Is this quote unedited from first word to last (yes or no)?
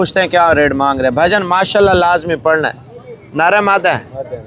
yes